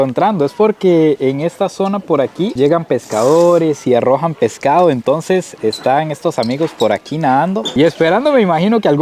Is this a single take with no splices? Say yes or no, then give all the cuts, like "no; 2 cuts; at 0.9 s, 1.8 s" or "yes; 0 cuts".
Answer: yes; 0 cuts